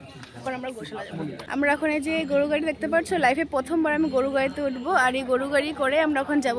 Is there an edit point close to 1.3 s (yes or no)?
yes